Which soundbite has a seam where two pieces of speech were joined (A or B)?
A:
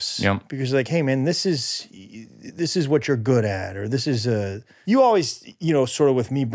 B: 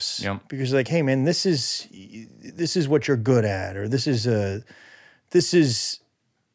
A